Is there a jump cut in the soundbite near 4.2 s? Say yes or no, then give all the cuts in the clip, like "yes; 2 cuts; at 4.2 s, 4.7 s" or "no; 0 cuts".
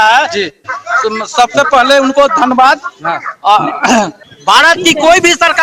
yes; 1 cut; at 4.2 s